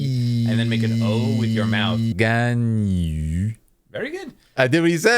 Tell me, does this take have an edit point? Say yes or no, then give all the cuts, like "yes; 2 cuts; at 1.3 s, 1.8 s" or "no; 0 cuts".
yes; 1 cut; at 2.1 s